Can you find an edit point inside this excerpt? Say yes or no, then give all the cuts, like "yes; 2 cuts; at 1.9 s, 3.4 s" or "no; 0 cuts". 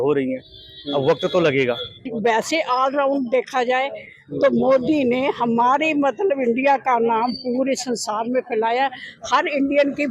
yes; 1 cut; at 2.1 s